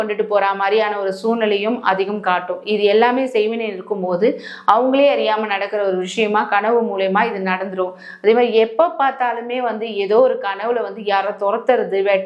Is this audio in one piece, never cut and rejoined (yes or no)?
yes